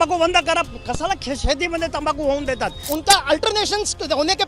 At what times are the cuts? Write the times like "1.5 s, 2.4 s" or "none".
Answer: 2.9 s